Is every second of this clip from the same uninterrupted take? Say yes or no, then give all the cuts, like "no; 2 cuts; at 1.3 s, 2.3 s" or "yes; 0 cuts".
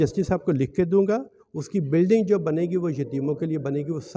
yes; 0 cuts